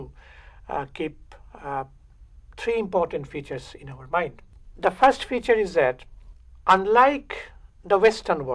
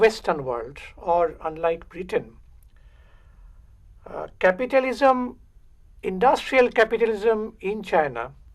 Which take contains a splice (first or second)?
first